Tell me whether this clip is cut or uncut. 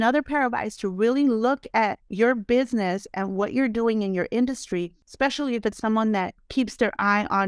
cut